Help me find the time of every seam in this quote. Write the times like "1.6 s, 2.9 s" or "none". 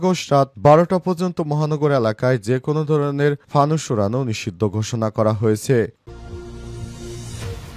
6.0 s